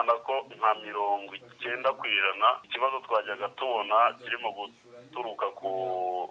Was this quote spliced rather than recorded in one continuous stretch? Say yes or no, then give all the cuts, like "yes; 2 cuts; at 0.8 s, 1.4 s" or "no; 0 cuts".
yes; 1 cut; at 2.7 s